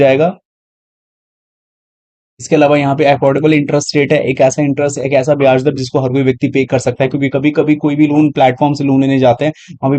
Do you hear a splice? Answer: no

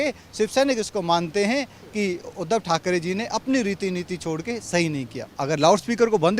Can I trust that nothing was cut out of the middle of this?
no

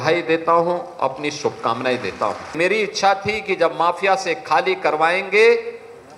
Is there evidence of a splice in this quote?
yes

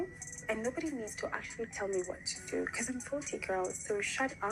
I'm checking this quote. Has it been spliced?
no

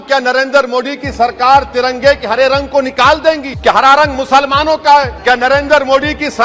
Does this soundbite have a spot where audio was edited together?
yes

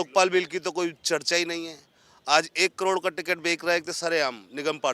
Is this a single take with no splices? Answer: yes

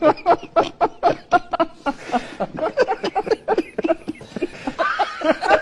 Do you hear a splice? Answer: yes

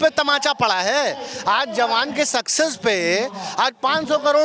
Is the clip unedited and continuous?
yes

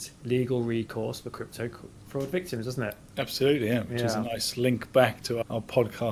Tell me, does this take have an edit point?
no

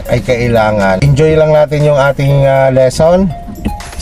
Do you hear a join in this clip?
yes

